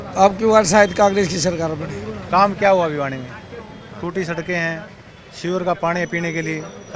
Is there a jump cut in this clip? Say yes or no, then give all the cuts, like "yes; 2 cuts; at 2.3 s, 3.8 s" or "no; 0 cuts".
yes; 1 cut; at 2.1 s